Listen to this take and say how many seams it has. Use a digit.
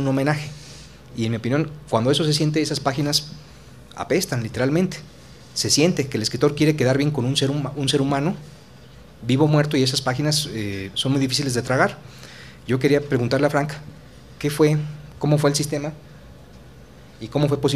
1